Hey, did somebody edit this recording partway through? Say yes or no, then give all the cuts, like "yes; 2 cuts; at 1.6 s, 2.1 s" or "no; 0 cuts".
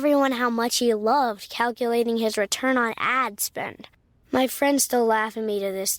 no; 0 cuts